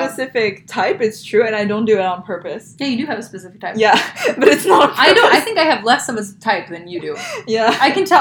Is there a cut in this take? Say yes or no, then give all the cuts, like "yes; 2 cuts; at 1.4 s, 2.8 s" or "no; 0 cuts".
no; 0 cuts